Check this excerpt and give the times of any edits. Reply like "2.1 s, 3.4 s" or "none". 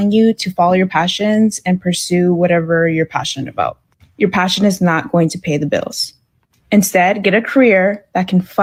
none

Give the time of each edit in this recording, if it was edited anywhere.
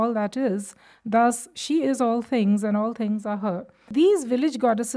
3.8 s

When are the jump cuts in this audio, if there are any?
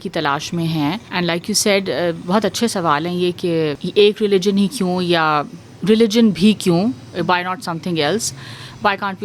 1.0 s, 3.8 s

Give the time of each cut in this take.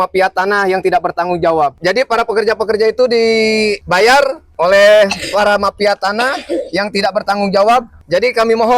1.8 s

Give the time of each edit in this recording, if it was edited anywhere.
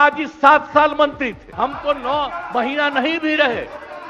1.4 s

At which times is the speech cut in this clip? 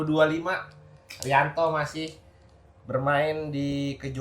none

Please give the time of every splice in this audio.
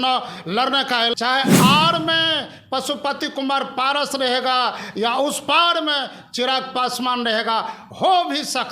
1.1 s

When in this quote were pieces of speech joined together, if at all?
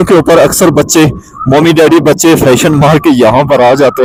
none

